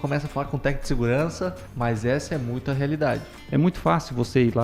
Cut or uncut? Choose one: cut